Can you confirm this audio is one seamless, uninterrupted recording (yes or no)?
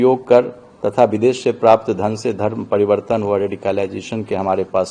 yes